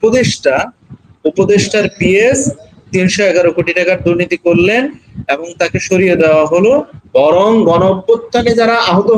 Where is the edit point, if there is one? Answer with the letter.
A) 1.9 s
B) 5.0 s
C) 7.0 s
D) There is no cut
C